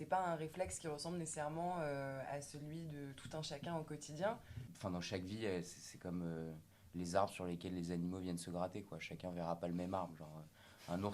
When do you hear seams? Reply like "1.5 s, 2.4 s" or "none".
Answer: 4.5 s